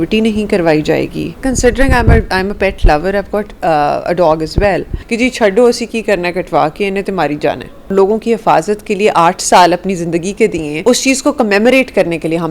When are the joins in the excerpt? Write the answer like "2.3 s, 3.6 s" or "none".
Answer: 1.4 s, 5.0 s, 7.9 s, 10.7 s

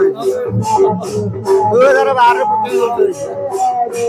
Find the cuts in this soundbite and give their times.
none

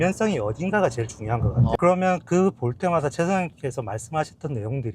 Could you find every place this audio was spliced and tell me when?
1.8 s

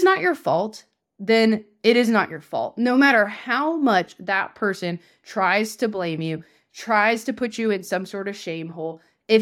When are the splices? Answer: none

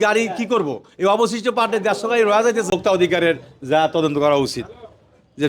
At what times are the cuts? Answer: 2.7 s

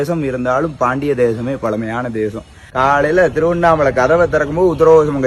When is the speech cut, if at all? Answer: 2.7 s

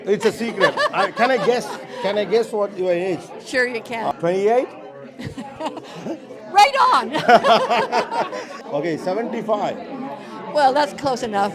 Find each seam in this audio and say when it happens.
none

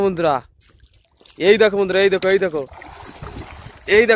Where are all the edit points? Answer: none

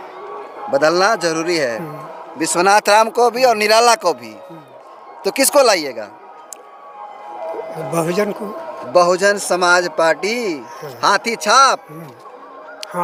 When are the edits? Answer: none

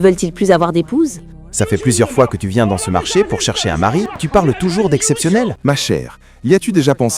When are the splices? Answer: 1.5 s, 4.2 s, 5.6 s

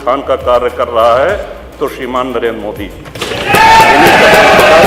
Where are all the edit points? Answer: none

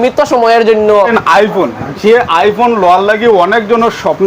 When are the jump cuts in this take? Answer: 1.2 s

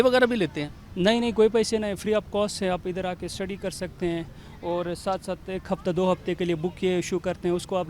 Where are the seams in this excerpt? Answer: none

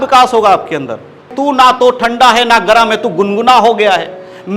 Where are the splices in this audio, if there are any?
1.3 s

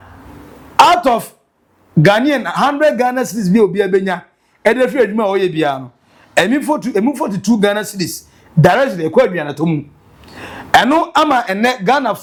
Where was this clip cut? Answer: none

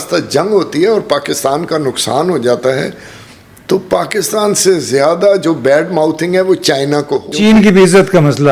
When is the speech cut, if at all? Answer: 7.3 s

